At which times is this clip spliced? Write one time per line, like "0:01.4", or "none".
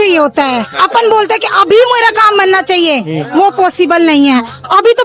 none